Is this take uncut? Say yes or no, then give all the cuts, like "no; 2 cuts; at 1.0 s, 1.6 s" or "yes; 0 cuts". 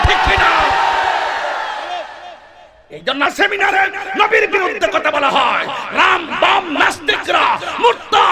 no; 1 cut; at 3.3 s